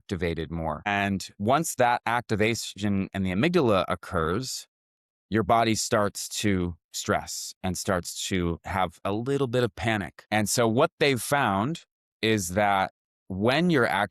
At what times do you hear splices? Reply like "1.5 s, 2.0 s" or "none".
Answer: 0.9 s, 9.0 s, 10.2 s